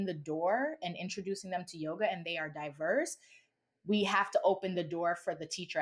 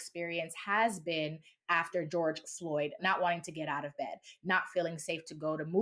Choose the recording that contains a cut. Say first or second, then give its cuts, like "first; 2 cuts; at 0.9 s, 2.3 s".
second; 2 cuts; at 2.1 s, 3.0 s